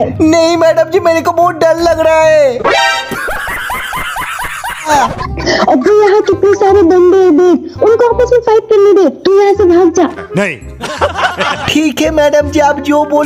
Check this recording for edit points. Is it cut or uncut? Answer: cut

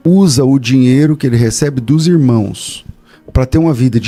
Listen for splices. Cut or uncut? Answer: uncut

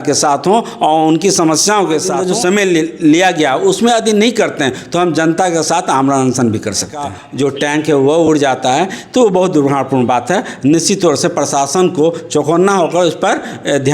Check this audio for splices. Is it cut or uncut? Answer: cut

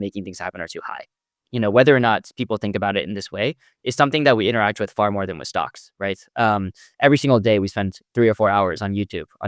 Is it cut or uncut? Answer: cut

